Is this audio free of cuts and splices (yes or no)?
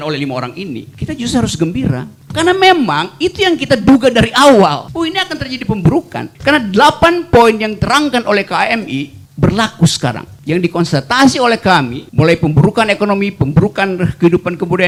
yes